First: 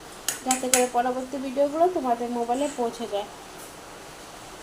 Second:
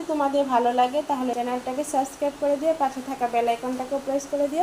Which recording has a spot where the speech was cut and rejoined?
second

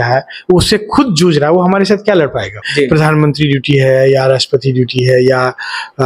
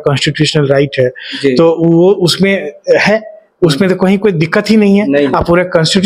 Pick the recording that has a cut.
first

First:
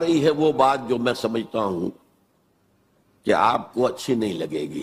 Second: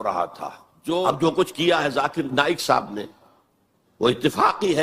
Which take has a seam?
second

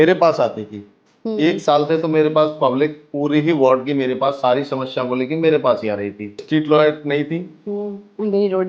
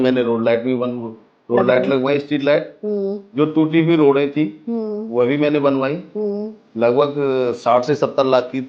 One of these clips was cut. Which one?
first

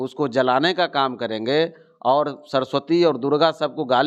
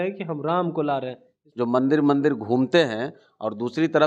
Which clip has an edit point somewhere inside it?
second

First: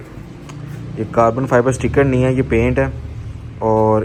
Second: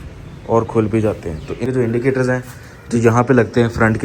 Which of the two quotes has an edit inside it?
second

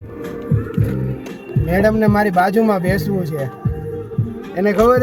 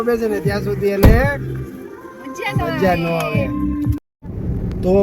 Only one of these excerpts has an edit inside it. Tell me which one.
second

